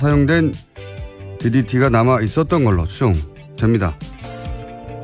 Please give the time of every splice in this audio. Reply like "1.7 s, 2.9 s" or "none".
none